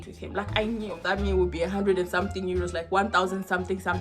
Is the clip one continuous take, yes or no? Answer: no